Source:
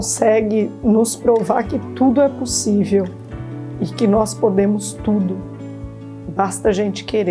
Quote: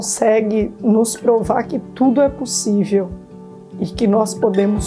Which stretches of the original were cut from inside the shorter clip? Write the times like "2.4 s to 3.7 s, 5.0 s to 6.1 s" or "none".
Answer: none